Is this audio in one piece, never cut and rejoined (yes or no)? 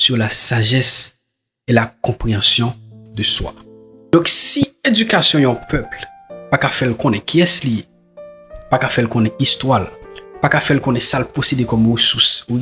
no